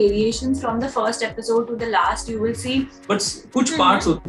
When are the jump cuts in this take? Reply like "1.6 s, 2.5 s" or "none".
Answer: 3.0 s

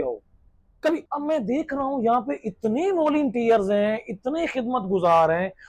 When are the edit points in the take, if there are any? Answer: 1.1 s

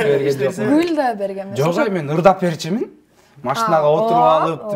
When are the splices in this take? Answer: none

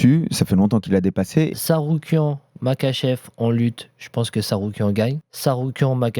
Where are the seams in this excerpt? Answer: 1.5 s, 5.3 s

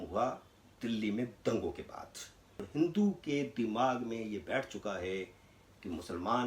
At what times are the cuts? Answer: 2.6 s

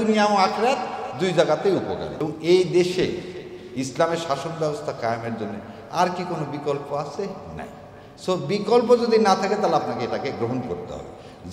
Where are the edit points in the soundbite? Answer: 2.2 s

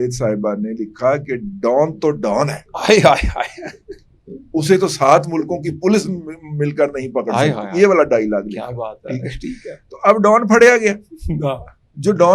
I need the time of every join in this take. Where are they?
none

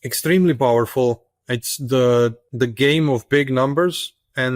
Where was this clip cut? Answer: 2.4 s

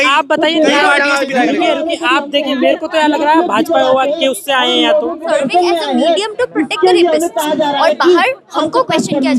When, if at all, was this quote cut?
5.3 s

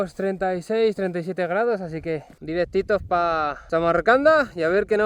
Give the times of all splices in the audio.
2.3 s, 3.6 s

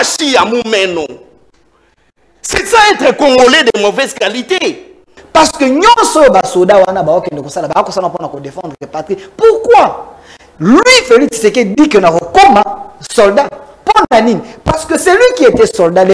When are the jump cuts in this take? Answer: 5.1 s

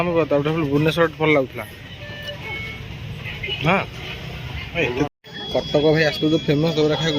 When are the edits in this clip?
5.1 s

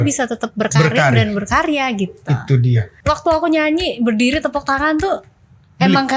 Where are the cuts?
2.9 s

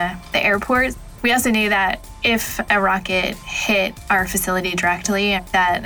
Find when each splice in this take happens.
1.1 s, 2.1 s

